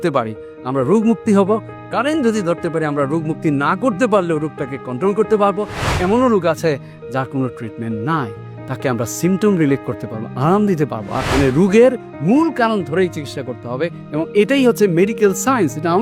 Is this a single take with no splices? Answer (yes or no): no